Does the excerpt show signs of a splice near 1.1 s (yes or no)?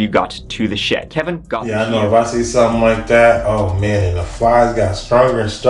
no